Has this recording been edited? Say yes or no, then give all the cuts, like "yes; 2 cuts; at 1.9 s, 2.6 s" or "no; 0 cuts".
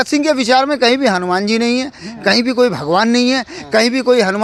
no; 0 cuts